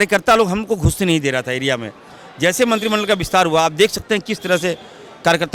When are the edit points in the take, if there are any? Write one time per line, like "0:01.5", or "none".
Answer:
none